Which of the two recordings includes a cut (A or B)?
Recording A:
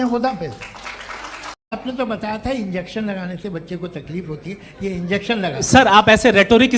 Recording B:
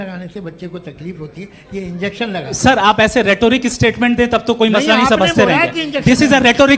A